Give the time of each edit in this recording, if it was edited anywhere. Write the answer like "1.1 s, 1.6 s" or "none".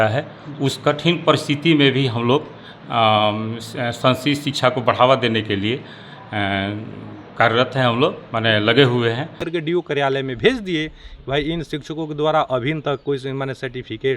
9.4 s